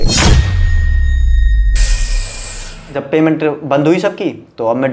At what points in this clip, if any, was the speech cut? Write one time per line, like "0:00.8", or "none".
0:03.0